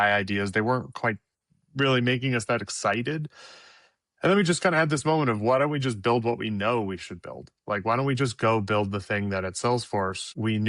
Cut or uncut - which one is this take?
uncut